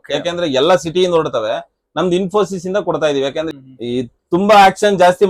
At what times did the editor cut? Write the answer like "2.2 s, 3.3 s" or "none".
3.5 s